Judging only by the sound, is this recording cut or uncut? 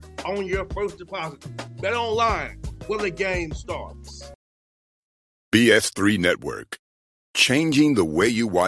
cut